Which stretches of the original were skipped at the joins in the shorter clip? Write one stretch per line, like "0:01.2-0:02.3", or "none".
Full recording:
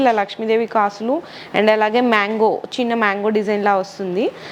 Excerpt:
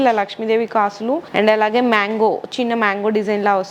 0:01.3-0:01.5